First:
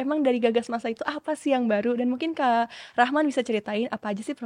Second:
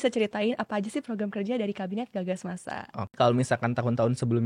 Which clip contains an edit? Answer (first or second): second